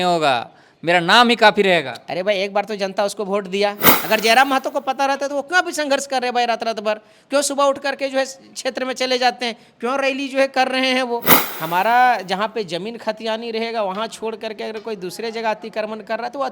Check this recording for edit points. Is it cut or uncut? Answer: cut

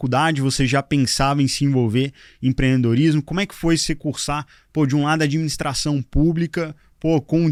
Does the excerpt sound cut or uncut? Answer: uncut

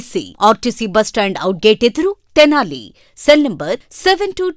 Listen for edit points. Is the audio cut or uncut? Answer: uncut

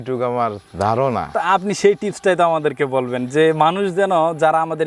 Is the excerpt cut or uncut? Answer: uncut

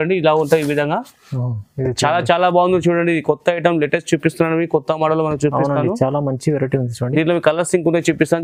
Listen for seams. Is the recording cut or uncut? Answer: uncut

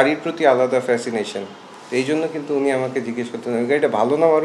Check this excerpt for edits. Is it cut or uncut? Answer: uncut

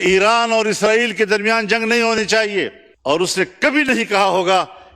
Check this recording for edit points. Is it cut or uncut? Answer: cut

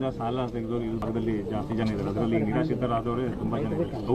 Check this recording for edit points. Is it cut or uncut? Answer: cut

